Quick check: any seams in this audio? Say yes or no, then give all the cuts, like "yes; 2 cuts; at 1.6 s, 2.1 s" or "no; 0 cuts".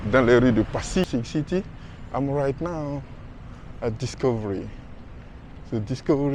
yes; 1 cut; at 1.0 s